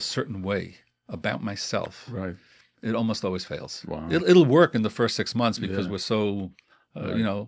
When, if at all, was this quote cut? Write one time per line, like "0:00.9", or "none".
none